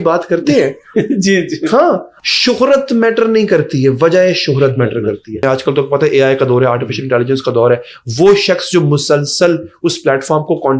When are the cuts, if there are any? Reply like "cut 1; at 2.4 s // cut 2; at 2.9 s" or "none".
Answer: cut 1; at 2.1 s // cut 2; at 5.4 s